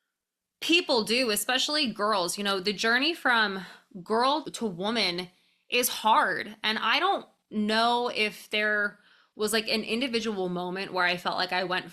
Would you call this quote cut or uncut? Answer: uncut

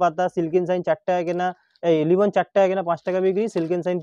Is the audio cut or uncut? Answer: uncut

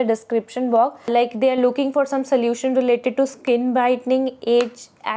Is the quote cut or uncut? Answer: cut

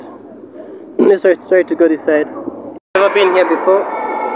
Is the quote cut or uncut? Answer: cut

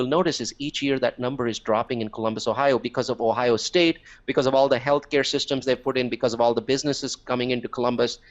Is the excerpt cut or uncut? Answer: uncut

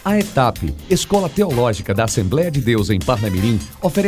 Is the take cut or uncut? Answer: uncut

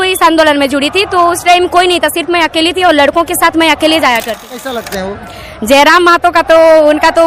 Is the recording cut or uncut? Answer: cut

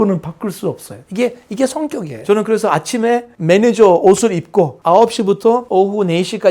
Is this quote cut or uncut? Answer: cut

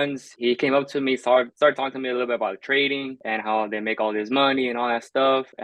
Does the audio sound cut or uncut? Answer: uncut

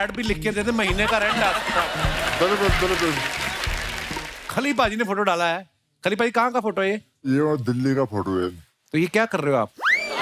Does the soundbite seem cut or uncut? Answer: cut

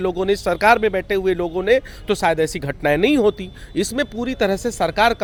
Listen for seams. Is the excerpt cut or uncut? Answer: uncut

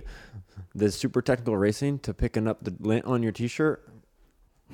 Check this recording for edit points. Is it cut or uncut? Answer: uncut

